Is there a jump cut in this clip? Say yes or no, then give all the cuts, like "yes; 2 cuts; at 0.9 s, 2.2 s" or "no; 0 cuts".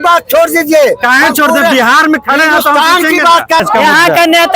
yes; 1 cut; at 3.6 s